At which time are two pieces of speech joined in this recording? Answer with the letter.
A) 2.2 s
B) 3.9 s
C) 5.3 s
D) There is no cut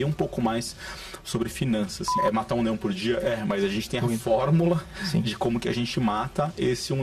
A